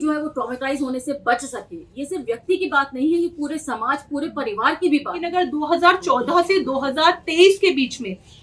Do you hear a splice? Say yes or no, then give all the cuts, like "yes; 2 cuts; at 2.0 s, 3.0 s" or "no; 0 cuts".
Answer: yes; 1 cut; at 5.3 s